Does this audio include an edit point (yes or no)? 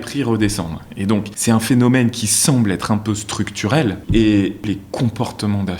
yes